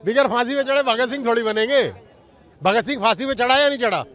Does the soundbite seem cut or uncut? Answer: uncut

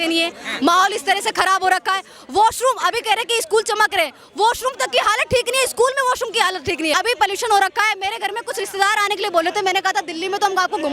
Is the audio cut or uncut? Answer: cut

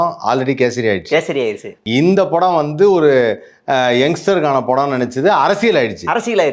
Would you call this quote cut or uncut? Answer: cut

